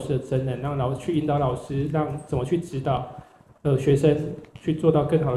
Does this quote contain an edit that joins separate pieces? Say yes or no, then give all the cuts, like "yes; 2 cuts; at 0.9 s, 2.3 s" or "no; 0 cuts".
no; 0 cuts